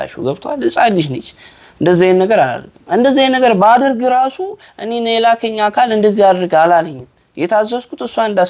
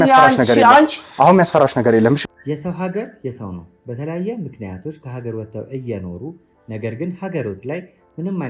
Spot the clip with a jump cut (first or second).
second